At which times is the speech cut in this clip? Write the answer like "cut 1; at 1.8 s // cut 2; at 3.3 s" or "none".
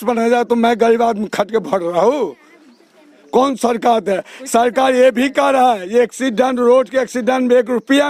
none